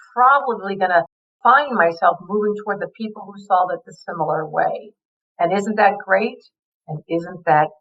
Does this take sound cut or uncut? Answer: uncut